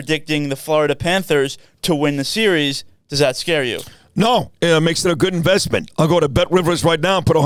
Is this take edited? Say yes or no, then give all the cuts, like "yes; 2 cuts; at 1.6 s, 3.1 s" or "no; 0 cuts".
no; 0 cuts